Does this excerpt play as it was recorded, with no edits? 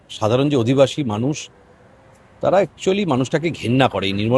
yes; 0 cuts

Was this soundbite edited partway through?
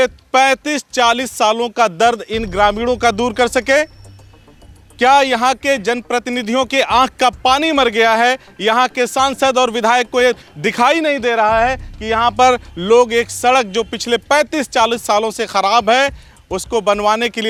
no; 0 cuts

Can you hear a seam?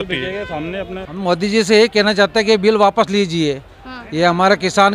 yes; 1 cut; at 1.1 s

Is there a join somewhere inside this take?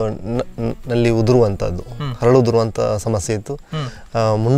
no; 0 cuts

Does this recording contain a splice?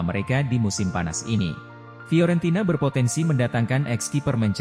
yes; 1 cut; at 1.9 s

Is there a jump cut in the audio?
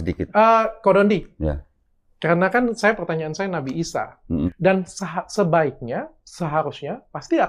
yes; 1 cut; at 4.5 s

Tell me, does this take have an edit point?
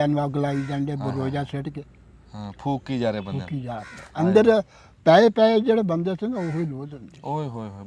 no; 0 cuts

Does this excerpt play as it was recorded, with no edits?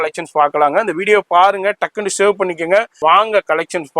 no; 1 cut; at 3.0 s

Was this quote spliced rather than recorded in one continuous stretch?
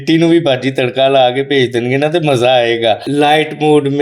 yes; 1 cut; at 3.0 s

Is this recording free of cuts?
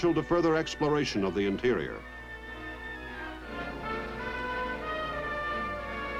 no; 1 cut; at 4.0 s

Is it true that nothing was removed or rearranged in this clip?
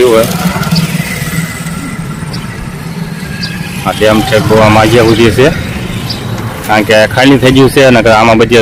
yes; 0 cuts

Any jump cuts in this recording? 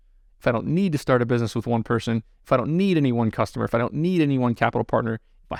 no; 0 cuts

